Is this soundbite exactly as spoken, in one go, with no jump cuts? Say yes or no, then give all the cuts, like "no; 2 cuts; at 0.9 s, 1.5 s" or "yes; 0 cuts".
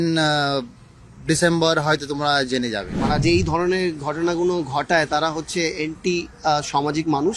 no; 1 cut; at 2.9 s